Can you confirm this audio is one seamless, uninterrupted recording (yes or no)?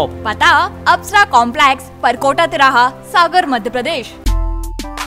no